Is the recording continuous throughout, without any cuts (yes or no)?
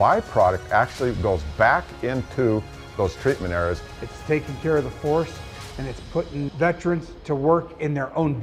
no